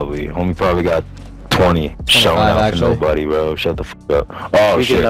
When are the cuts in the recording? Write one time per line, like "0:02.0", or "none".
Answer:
0:02.0